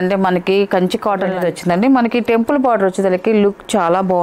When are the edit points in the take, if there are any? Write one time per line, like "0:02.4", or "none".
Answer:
0:01.3